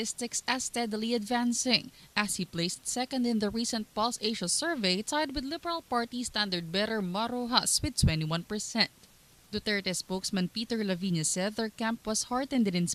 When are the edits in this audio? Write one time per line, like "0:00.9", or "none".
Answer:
none